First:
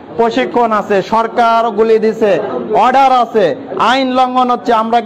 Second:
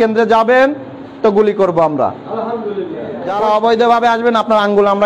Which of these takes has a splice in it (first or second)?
second